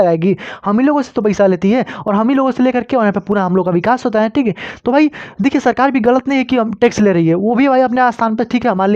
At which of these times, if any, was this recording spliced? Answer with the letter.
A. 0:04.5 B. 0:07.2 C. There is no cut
C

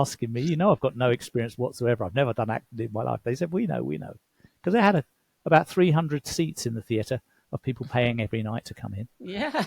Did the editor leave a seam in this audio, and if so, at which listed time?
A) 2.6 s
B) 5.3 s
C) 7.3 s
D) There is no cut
D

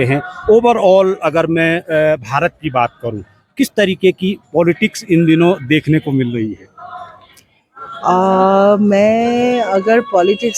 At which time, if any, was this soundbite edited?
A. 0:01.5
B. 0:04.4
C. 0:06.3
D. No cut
D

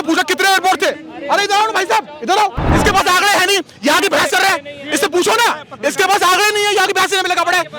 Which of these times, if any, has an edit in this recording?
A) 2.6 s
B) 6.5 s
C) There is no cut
A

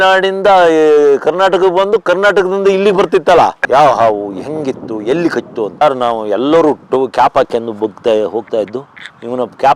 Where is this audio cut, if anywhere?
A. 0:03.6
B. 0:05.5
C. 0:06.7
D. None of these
A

